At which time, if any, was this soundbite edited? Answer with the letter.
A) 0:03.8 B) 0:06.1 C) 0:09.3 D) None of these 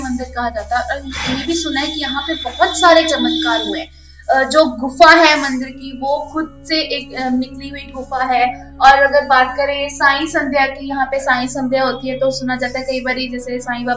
D